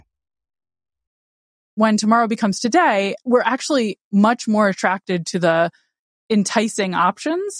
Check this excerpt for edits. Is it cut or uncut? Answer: cut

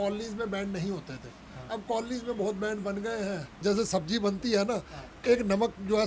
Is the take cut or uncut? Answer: cut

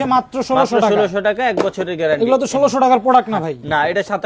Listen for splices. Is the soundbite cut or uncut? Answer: uncut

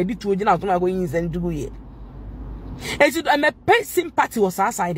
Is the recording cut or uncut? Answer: uncut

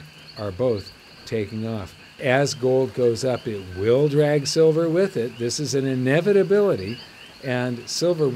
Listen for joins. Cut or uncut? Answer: cut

